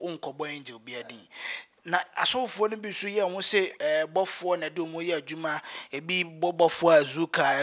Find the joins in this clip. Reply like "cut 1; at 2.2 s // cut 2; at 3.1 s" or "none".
none

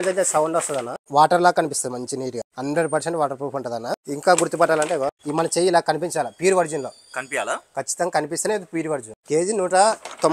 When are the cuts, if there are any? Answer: cut 1; at 1.1 s // cut 2; at 2.5 s // cut 3; at 4.0 s // cut 4; at 5.2 s // cut 5; at 9.1 s

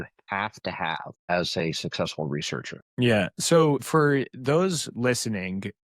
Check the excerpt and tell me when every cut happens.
cut 1; at 1.3 s // cut 2; at 2.8 s // cut 3; at 3.8 s

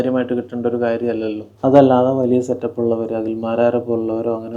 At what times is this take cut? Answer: cut 1; at 1.4 s

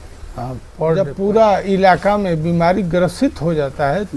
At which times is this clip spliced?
cut 1; at 1.1 s

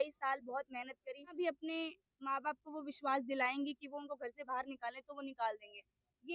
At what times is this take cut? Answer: cut 1; at 1.3 s

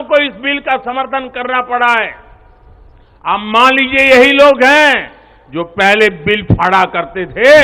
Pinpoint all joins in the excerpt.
none

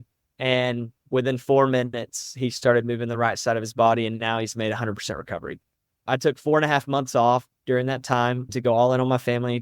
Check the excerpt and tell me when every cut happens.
cut 1; at 8.5 s

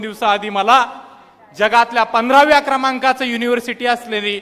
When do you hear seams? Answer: none

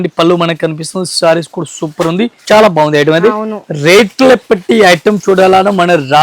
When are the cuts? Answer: cut 1; at 2.4 s

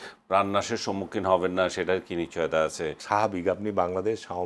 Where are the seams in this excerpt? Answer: cut 1; at 3.0 s

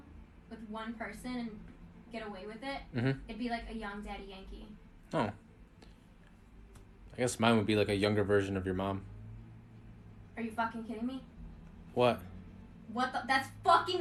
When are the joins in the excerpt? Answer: none

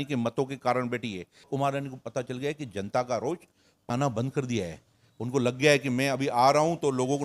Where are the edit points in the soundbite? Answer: cut 1; at 1.5 s // cut 2; at 3.9 s

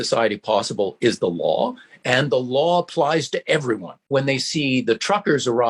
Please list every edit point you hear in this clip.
cut 1; at 1.9 s // cut 2; at 3.9 s

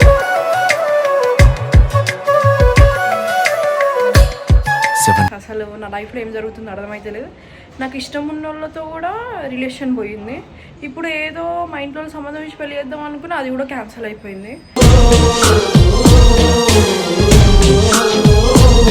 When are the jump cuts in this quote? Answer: cut 1; at 5.3 s

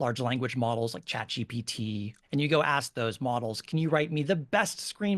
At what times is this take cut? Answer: cut 1; at 2.2 s

